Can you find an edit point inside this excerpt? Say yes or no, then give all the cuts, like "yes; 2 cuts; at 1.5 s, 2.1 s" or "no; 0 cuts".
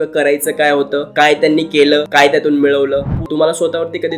yes; 2 cuts; at 2.1 s, 3.2 s